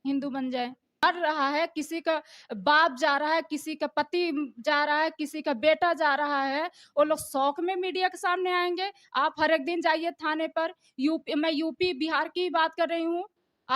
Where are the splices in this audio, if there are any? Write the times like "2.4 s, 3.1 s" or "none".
1.0 s